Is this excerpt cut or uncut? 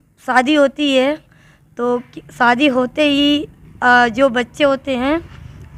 uncut